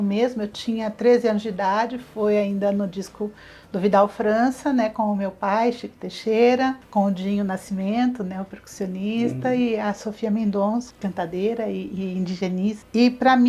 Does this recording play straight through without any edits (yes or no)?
yes